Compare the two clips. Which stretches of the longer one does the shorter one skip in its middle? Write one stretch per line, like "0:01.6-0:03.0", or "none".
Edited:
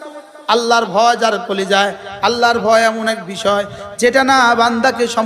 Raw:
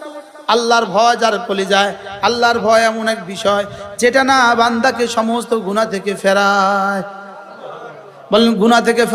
none